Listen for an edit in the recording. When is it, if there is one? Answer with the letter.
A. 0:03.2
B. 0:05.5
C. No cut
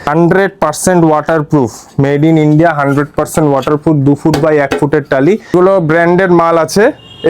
B